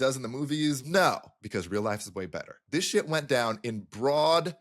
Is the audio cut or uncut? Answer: cut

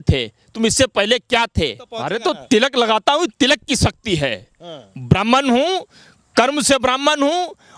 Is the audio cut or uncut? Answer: cut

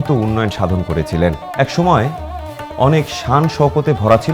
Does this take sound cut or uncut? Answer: cut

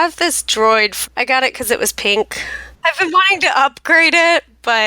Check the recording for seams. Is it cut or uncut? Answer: cut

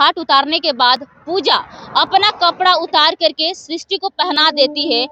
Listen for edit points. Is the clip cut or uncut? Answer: uncut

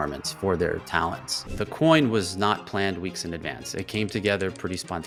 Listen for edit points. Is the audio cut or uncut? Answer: uncut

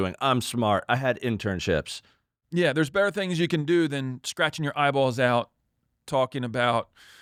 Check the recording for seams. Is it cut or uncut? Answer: uncut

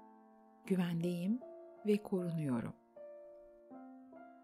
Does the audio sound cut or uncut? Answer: cut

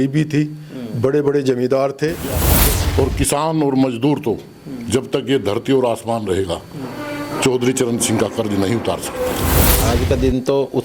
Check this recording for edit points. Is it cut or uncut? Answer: cut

